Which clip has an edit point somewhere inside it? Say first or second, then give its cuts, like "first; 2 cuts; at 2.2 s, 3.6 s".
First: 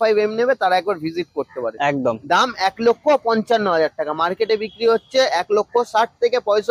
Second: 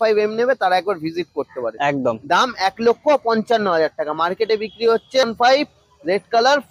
second; 1 cut; at 5.3 s